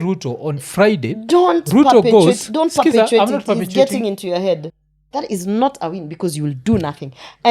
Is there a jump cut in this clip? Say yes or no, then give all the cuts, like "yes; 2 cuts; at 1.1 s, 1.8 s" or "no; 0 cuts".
yes; 1 cut; at 4.7 s